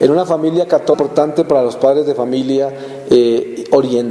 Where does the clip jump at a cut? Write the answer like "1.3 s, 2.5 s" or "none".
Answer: none